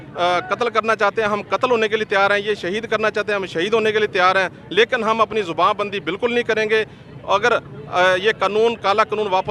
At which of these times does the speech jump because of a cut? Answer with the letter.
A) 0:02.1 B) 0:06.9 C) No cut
C